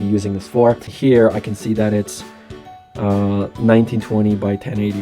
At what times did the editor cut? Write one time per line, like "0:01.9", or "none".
0:00.9